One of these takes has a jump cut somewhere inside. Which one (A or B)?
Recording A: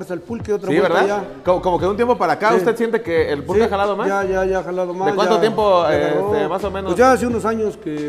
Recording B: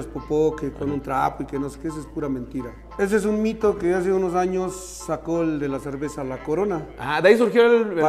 B